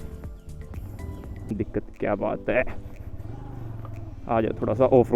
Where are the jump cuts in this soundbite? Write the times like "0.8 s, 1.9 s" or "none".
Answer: 1.4 s